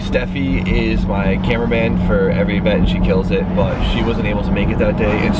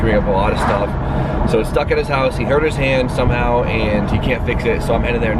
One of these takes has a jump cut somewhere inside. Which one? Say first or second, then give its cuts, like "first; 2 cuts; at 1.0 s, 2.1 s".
second; 1 cut; at 3.6 s